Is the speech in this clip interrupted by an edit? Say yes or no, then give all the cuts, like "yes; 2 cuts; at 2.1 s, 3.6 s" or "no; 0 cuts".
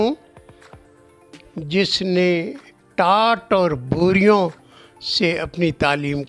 no; 0 cuts